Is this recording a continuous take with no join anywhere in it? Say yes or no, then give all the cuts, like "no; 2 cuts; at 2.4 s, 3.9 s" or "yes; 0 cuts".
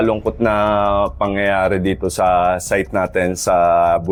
yes; 0 cuts